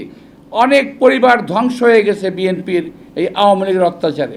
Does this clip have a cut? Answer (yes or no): no